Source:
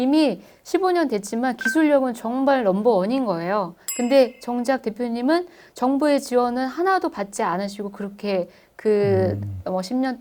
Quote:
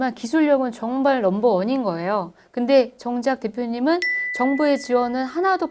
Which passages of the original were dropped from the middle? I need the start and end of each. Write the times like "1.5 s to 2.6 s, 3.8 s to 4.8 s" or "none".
none